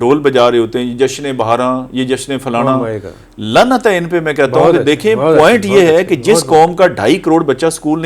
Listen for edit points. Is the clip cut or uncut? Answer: uncut